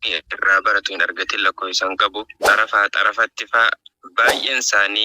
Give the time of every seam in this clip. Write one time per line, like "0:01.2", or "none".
0:02.3